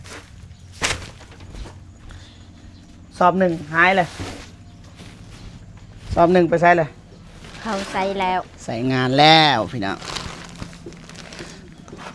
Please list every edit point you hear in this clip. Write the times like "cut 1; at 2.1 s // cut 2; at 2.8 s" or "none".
none